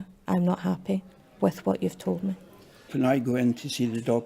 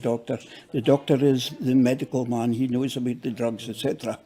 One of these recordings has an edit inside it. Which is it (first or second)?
first